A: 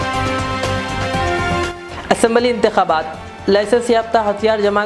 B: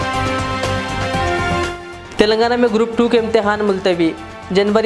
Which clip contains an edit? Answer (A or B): B